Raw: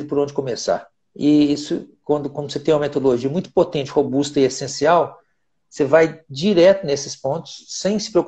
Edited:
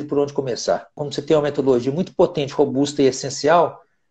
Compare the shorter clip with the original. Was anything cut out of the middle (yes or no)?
yes